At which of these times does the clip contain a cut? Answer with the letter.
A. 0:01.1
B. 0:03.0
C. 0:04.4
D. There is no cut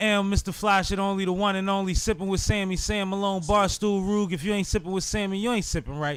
D